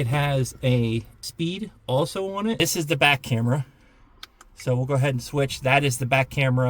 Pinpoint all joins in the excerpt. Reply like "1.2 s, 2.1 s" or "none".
2.6 s